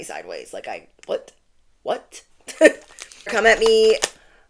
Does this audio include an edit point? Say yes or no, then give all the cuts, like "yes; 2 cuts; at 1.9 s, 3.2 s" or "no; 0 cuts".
yes; 1 cut; at 3.4 s